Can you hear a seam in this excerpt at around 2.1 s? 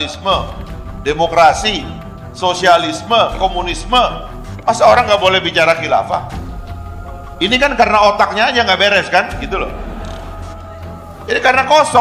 no; 0 cuts

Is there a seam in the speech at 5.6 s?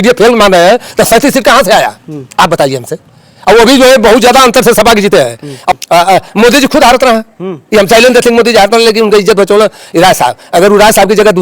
yes; 1 cut; at 5.6 s

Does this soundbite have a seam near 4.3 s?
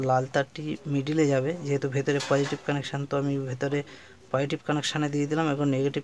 no; 0 cuts

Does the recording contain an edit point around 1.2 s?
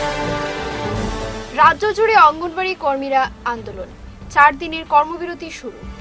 no; 0 cuts

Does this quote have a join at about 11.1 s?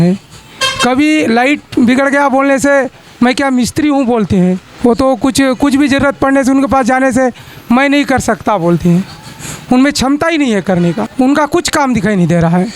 yes; 2 cuts; at 4.7 s, 11.1 s

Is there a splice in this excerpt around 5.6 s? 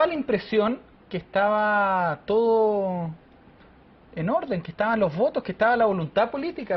yes; 1 cut; at 5.6 s

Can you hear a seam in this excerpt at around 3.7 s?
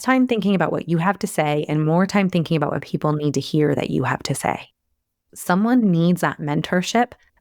no; 1 cut; at 5.2 s

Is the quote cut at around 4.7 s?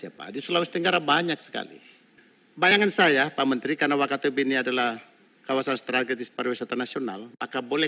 no; 1 cut; at 2.7 s

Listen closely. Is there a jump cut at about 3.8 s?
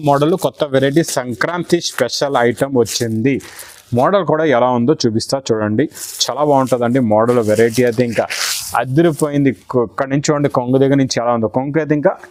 no; 0 cuts

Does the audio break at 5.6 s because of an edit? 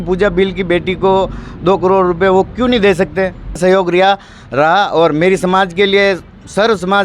no; 1 cut; at 3.6 s

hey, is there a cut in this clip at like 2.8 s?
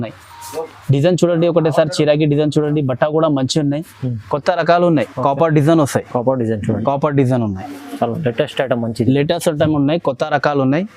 no; 1 cut; at 5.1 s

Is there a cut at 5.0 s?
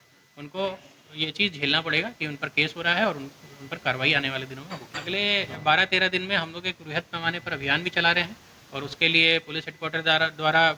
yes; 1 cut; at 5.0 s

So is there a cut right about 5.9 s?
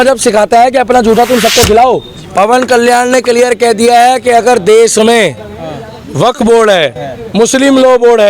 no; 1 cut; at 2.2 s

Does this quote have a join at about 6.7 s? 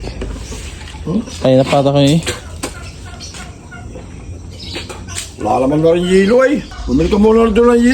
yes; 1 cut; at 6.7 s

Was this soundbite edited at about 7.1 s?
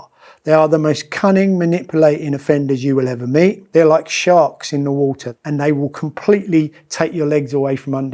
no; 2 cuts; at 3.6 s, 5.3 s

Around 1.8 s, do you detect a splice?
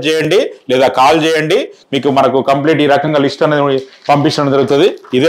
yes; 1 cut; at 1.8 s

